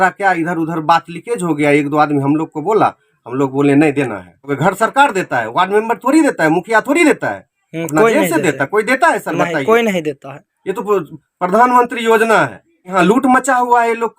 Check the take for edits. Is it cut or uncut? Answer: cut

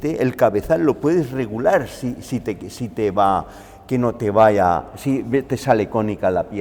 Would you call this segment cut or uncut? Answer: uncut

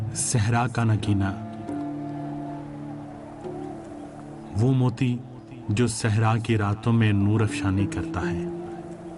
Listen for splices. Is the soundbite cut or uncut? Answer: uncut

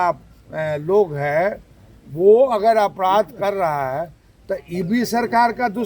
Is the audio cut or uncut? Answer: uncut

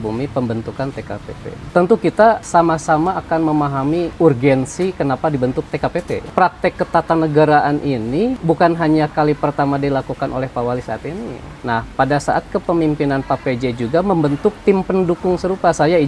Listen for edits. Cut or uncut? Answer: cut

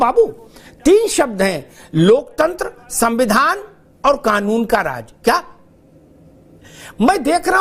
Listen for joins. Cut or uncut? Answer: uncut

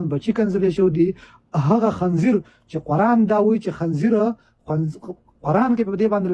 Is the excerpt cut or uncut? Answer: uncut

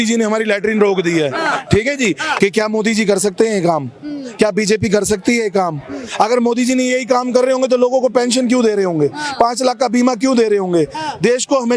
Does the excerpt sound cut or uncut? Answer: uncut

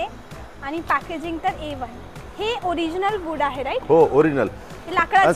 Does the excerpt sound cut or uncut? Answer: uncut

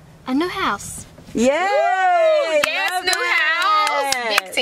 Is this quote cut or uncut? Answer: uncut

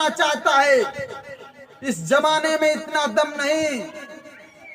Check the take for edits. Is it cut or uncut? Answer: uncut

